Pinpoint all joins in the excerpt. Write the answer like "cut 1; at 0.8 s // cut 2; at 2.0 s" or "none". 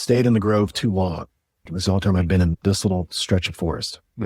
cut 1; at 1.4 s